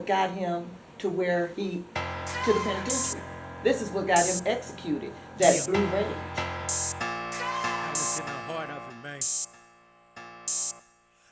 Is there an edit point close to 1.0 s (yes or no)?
no